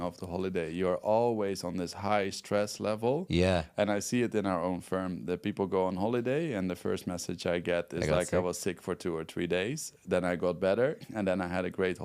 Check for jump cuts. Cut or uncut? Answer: uncut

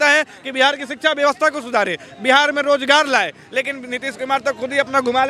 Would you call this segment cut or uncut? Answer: uncut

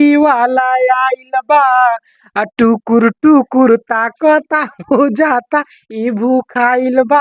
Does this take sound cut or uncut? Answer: uncut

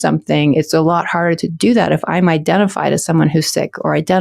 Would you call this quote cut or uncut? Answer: uncut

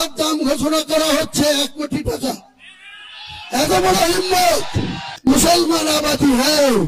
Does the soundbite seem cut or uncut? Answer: cut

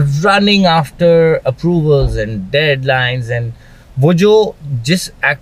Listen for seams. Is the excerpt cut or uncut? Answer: uncut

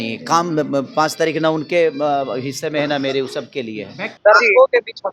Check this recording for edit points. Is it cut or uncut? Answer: cut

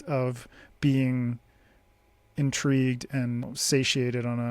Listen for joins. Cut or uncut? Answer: cut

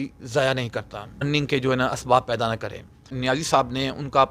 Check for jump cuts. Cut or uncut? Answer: cut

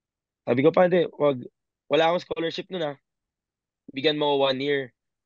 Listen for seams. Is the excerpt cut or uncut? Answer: uncut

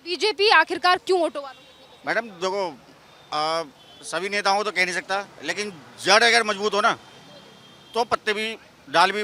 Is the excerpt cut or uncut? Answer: uncut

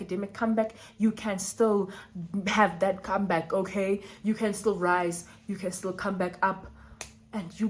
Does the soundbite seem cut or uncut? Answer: uncut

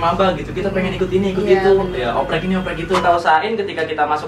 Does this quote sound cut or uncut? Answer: cut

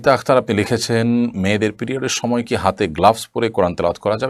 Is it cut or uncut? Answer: uncut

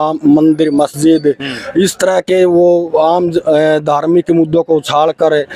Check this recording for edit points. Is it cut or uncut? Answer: uncut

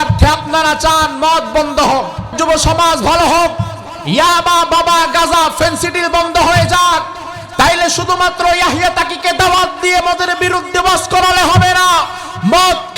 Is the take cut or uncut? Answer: cut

